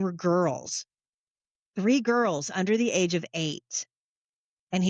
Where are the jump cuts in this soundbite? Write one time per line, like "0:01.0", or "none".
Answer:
none

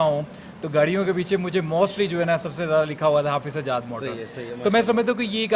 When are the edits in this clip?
none

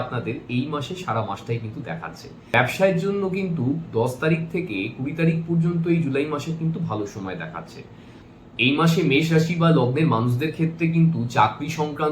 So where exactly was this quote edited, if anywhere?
0:02.5
0:08.1

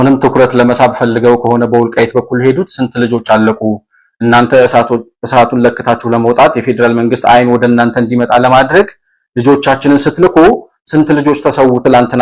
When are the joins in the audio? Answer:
none

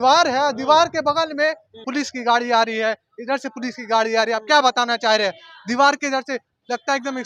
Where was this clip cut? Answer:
0:01.8

